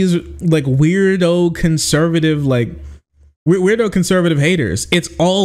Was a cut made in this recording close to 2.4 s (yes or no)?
no